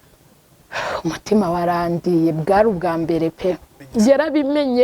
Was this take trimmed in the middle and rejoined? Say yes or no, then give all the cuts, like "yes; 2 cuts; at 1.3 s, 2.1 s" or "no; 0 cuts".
yes; 1 cut; at 3.7 s